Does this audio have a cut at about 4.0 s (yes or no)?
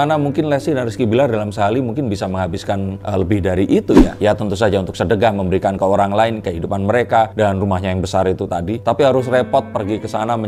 no